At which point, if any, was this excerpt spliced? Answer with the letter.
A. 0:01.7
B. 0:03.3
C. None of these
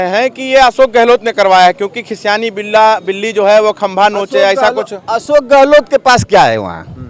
C